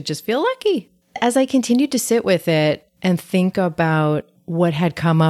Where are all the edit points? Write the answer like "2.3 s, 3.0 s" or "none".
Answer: 1.2 s, 4.4 s

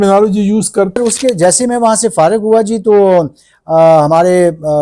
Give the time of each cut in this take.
1.0 s

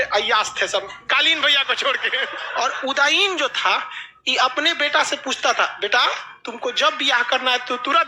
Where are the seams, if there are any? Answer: 2.4 s

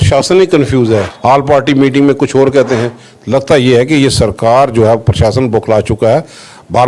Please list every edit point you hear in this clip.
1.1 s

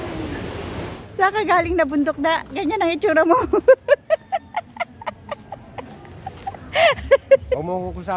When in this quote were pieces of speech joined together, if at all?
1.0 s

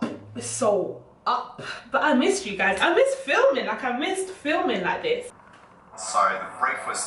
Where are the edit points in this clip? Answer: 5.4 s

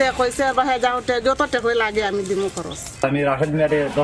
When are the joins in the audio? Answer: 3.0 s

